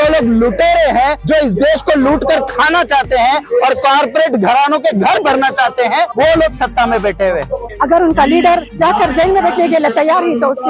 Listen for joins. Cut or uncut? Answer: cut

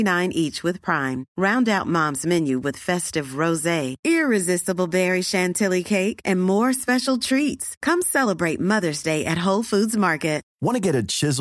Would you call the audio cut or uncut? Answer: uncut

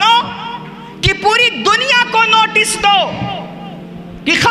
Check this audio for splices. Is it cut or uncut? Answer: uncut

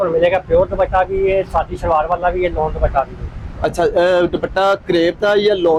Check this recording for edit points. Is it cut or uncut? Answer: uncut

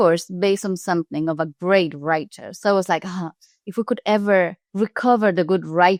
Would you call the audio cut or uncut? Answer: uncut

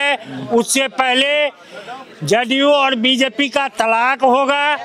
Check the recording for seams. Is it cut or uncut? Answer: uncut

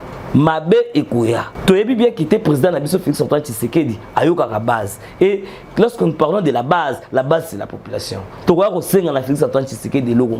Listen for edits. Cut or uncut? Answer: cut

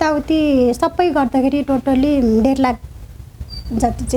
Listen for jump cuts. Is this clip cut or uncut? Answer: uncut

